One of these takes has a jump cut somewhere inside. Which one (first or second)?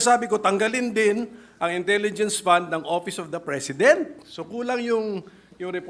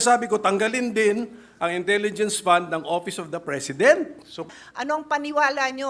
second